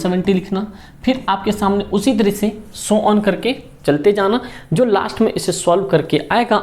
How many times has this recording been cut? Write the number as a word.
zero